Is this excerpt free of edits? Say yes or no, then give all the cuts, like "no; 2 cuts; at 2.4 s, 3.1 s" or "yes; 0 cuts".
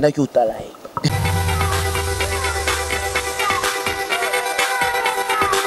no; 1 cut; at 1.1 s